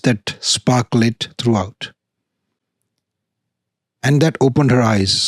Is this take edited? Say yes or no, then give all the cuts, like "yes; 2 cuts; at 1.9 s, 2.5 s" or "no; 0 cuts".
no; 0 cuts